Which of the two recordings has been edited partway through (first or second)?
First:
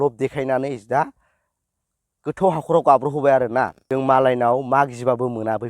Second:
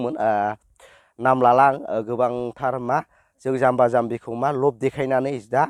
first